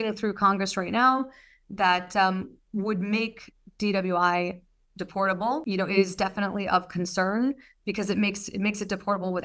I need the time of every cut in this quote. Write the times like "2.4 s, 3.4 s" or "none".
none